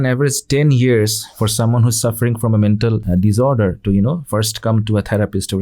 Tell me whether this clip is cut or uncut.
cut